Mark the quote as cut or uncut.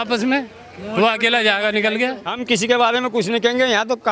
cut